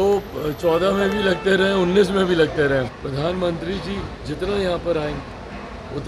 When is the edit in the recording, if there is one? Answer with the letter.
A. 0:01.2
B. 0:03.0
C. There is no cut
B